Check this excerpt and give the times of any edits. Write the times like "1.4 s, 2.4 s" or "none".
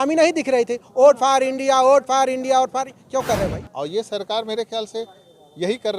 3.5 s